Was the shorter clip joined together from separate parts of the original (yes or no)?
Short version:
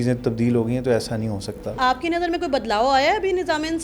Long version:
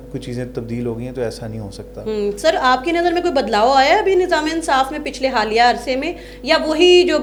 yes